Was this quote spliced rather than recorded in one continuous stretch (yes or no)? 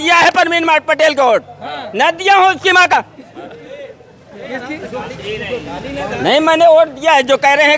no